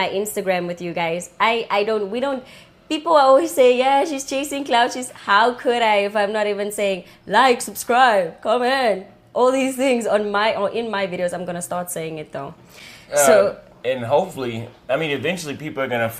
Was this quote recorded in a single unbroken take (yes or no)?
yes